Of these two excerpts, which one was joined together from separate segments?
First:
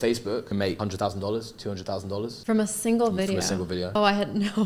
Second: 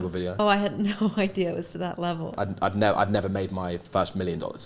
second; 1 cut; at 2.3 s

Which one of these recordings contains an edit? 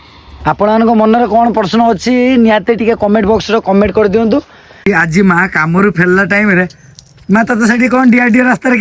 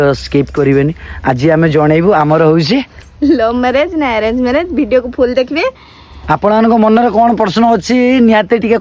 first; 1 cut; at 4.9 s

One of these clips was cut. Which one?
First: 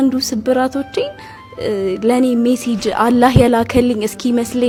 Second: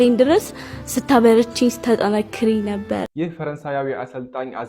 second; 1 cut; at 3.1 s

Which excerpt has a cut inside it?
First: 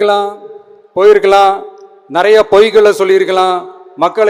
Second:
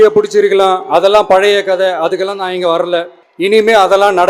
second; 1 cut; at 3.2 s

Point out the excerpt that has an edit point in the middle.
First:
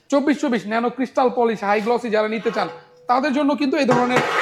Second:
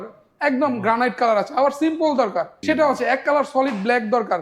second; 1 cut; at 2.5 s

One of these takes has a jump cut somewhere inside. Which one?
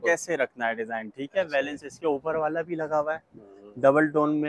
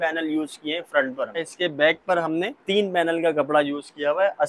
second; 2 cuts; at 1.4 s, 2.6 s

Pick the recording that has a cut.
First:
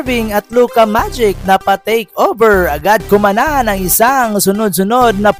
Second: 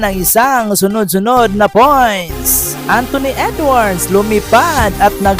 second; 1 cut; at 2.7 s

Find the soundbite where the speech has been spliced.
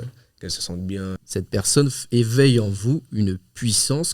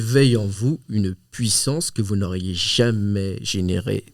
first; 1 cut; at 1.2 s

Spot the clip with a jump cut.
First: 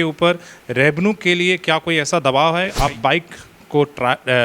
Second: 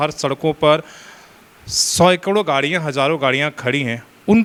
first; 1 cut; at 2.8 s

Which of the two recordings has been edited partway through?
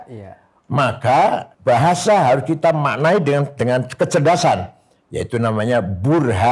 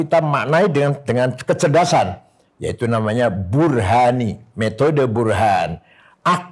first; 1 cut; at 1.5 s

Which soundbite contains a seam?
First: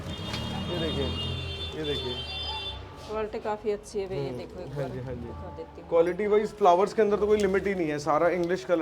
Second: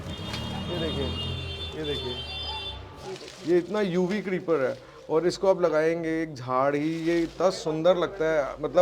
second; 1 cut; at 3.0 s

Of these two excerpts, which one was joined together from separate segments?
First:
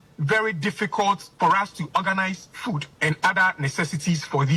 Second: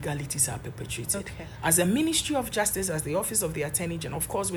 first; 2 cuts; at 1.3 s, 2.9 s

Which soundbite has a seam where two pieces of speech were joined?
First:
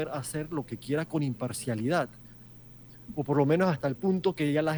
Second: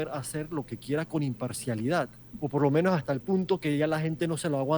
second; 1 cut; at 2.2 s

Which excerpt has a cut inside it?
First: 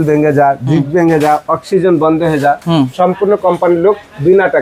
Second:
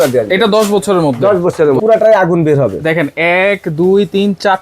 second; 1 cut; at 1.8 s

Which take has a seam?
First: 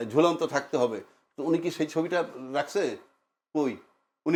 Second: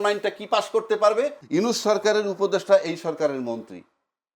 second; 1 cut; at 1.4 s

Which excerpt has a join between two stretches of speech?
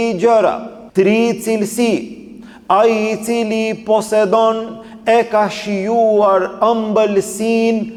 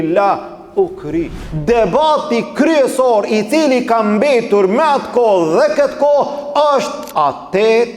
second; 2 cuts; at 1.4 s, 7.0 s

